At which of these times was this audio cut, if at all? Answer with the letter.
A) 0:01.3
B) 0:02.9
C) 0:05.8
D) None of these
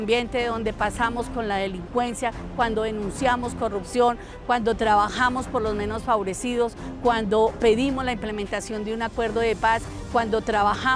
D